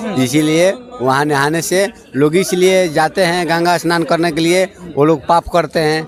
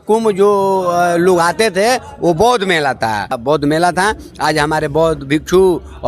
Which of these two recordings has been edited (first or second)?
second